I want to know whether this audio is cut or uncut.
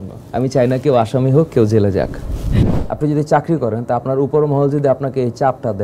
cut